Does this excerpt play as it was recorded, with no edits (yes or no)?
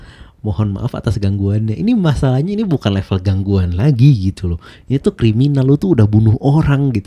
yes